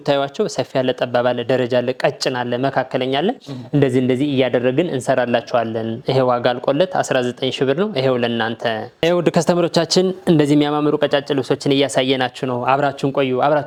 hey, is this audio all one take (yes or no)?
yes